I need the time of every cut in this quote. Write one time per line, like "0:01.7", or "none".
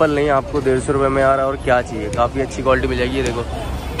none

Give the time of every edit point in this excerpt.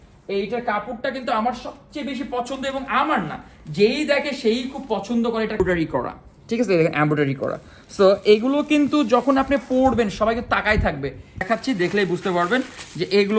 0:05.6
0:11.4

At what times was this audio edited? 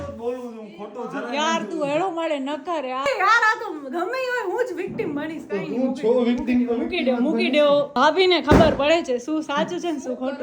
0:03.1
0:07.9

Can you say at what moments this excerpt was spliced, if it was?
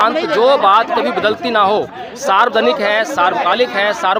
none

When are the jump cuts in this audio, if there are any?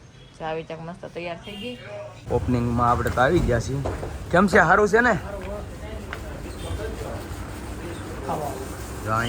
0:02.1

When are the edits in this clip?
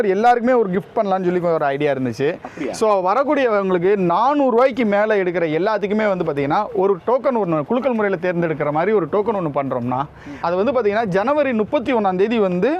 0:10.3

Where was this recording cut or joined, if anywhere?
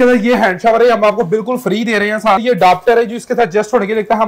0:02.4

